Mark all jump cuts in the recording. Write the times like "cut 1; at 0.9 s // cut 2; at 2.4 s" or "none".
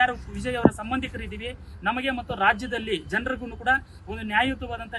none